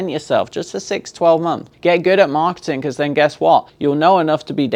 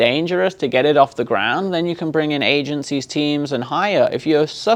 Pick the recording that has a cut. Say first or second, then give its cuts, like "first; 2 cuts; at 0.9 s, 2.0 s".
first; 2 cuts; at 1.7 s, 3.7 s